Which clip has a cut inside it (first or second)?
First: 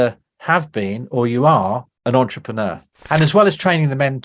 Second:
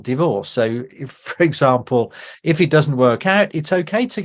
first